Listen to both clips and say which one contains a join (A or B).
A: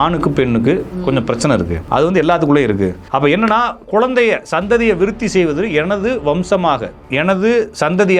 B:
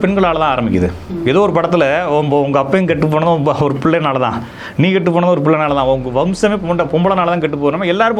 A